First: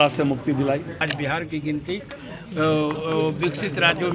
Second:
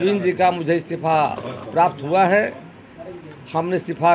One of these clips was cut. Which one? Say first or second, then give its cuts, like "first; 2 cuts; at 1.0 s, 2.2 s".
first; 1 cut; at 1.1 s